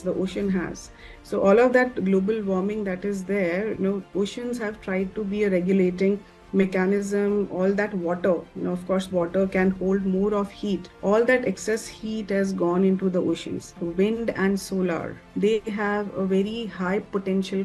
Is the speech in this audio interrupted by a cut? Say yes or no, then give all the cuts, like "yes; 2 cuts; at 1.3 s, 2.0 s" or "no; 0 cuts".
yes; 1 cut; at 13.8 s